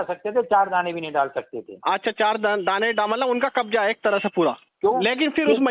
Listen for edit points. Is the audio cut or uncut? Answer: cut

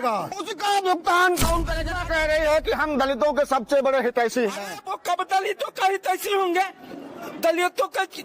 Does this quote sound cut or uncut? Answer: cut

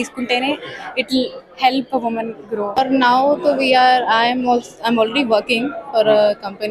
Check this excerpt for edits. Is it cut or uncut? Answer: cut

